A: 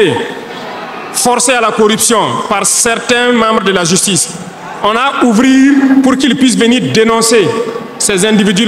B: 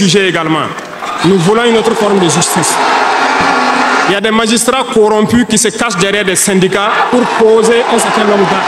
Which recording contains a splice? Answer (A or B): B